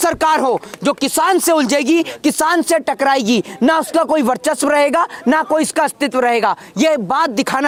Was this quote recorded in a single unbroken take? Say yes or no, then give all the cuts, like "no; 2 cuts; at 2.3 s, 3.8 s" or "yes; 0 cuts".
yes; 0 cuts